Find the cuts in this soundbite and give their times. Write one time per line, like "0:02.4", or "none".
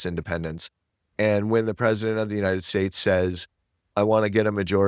none